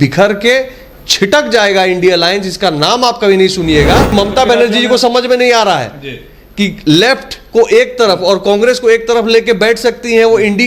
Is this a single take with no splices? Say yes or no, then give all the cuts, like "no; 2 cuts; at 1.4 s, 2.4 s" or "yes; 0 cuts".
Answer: no; 1 cut; at 4.1 s